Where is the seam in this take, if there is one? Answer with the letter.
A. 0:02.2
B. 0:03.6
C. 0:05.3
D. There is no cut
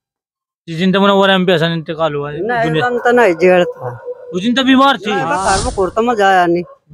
C